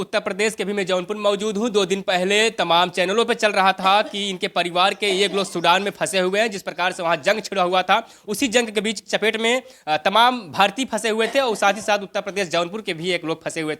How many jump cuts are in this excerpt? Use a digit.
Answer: 0